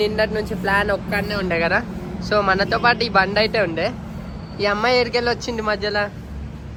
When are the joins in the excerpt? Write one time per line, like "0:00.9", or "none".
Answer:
none